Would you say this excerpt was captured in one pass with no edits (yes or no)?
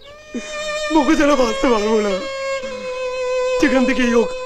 yes